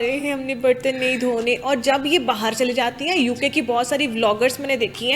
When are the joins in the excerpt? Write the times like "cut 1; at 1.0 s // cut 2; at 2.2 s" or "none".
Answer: none